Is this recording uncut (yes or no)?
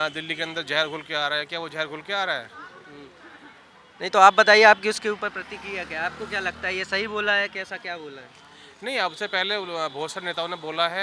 yes